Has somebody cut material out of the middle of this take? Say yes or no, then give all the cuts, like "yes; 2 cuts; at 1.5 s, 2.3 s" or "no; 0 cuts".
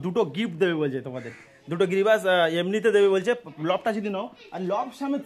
no; 0 cuts